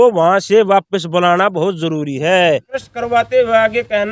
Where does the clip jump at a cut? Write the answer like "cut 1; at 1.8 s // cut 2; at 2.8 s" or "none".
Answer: cut 1; at 2.9 s